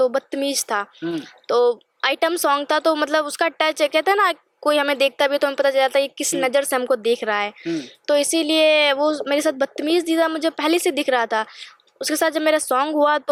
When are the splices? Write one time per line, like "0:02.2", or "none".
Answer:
none